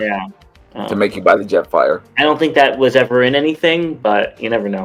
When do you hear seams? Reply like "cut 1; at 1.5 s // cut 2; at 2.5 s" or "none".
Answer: none